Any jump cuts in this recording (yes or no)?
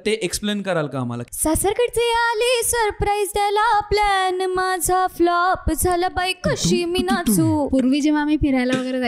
yes